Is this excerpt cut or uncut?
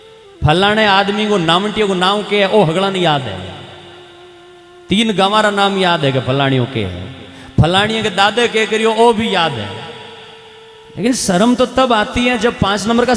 uncut